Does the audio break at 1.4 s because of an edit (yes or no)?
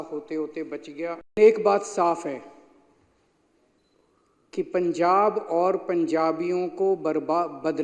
yes